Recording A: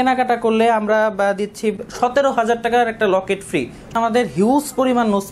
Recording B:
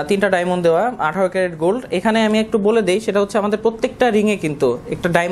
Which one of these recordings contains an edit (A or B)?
A